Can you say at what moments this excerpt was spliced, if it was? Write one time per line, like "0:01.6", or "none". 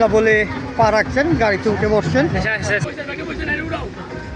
0:02.9